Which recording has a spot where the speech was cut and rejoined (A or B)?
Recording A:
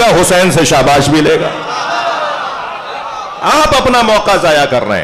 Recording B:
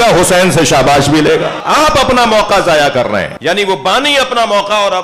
B